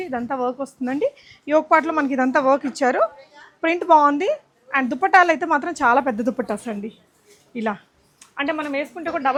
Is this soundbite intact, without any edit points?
yes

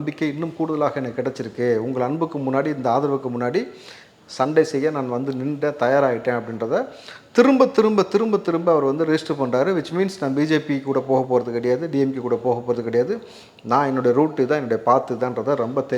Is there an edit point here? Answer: no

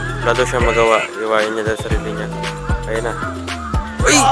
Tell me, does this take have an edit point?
no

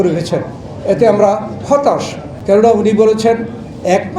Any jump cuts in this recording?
yes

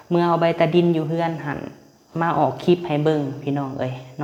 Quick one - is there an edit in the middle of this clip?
no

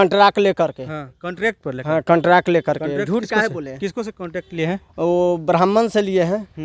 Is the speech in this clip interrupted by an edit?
no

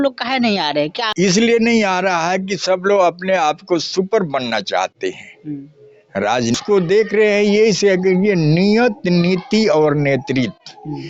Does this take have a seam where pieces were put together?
yes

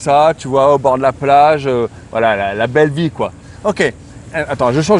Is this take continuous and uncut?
yes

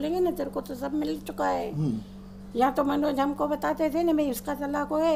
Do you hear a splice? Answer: no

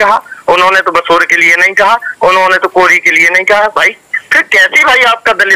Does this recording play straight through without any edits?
yes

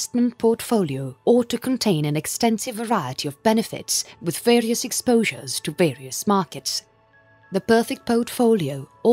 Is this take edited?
yes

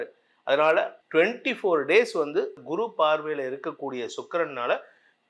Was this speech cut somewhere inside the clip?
yes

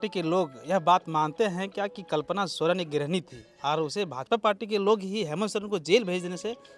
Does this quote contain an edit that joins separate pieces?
no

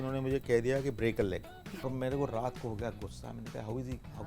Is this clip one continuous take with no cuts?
no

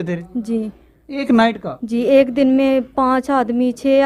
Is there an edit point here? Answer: no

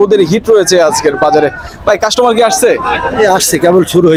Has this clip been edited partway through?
no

